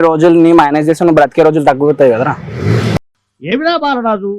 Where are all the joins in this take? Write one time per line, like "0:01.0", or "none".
0:02.9